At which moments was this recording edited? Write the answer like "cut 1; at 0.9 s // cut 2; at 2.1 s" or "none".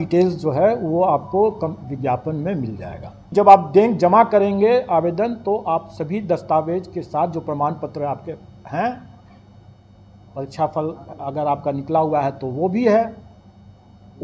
cut 1; at 3.3 s